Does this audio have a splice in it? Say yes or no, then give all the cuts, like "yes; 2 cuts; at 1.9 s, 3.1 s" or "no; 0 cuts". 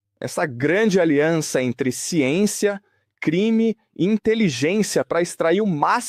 no; 0 cuts